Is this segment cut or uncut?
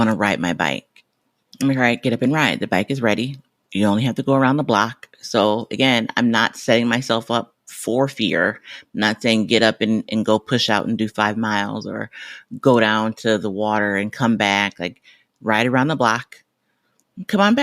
uncut